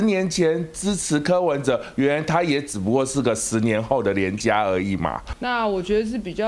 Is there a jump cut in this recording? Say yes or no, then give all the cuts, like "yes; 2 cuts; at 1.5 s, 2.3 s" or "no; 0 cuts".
yes; 1 cut; at 5.3 s